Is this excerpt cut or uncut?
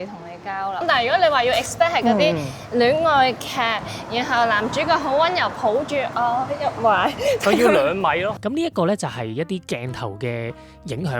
cut